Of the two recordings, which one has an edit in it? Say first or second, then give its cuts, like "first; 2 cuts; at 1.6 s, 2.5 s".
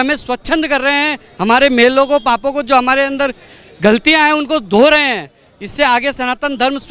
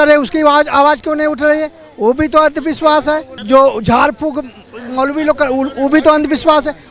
second; 1 cut; at 3.4 s